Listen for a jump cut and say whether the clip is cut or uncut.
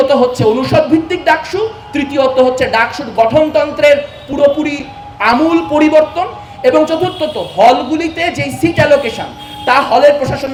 uncut